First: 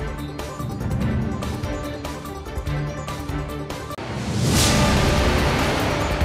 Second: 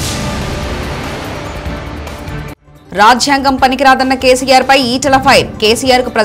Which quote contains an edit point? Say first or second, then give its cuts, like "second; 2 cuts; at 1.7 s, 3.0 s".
second; 1 cut; at 2.7 s